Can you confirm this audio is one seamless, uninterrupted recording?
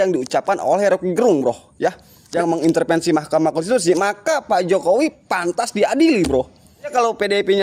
no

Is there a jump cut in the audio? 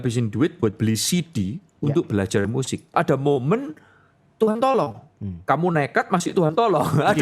yes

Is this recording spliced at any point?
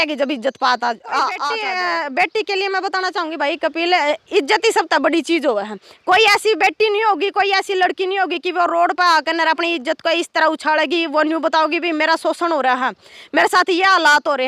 yes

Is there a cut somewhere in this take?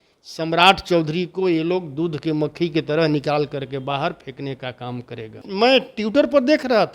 yes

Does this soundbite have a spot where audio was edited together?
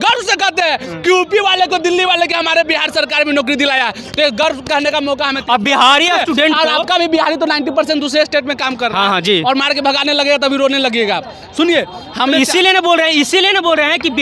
no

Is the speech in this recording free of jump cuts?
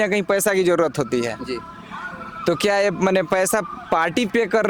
yes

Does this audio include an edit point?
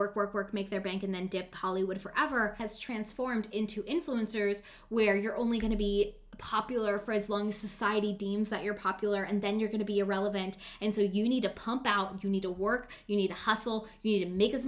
yes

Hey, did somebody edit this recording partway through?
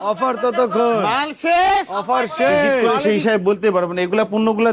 yes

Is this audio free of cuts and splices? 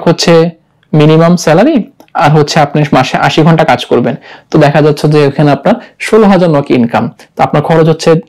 yes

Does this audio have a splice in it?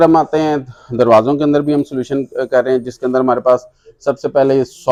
no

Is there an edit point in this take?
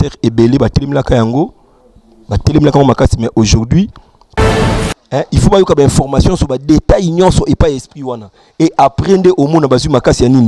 yes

